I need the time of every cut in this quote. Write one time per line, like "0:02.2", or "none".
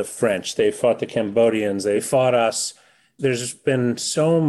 0:02.0
0:03.1